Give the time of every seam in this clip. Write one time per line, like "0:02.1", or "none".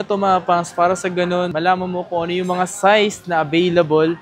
0:01.5